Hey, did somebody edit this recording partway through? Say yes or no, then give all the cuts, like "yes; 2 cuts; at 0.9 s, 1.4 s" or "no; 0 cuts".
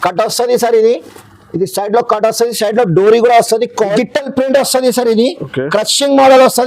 yes; 1 cut; at 3.8 s